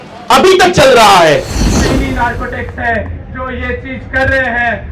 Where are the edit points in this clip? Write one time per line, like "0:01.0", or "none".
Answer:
0:01.5